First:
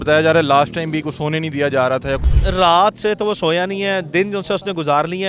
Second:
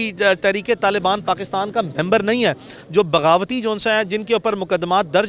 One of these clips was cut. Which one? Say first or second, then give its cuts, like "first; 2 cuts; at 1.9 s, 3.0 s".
first; 1 cut; at 2.3 s